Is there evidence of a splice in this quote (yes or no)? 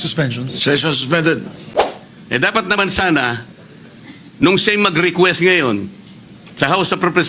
yes